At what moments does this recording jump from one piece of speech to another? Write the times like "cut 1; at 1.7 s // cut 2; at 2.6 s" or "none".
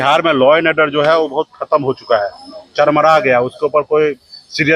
none